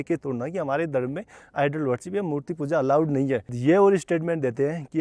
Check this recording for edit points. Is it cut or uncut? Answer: cut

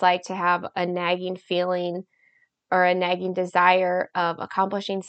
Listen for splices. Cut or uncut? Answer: uncut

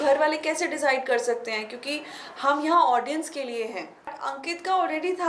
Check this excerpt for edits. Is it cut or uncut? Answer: cut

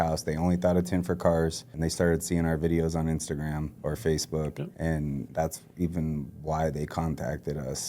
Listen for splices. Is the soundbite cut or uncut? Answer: cut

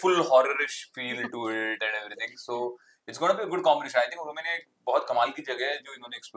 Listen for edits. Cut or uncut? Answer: uncut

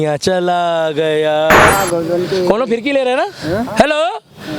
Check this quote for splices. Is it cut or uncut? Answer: cut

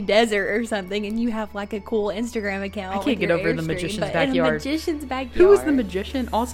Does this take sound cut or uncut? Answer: uncut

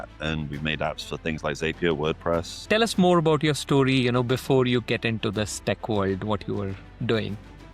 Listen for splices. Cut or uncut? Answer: cut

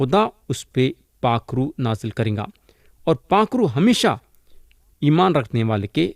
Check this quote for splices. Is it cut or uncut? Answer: uncut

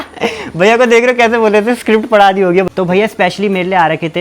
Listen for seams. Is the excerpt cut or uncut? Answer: cut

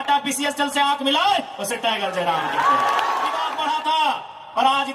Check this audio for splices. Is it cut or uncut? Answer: cut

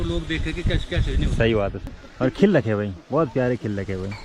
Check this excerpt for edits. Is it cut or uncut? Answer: cut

